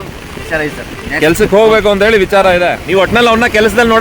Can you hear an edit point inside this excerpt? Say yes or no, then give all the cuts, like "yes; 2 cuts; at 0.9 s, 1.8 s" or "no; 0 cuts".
yes; 1 cut; at 2.8 s